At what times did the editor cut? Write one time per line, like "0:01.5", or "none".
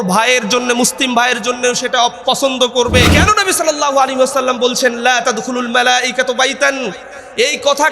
0:03.1